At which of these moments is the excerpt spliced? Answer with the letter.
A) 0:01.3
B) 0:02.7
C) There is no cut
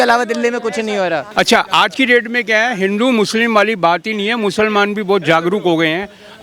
A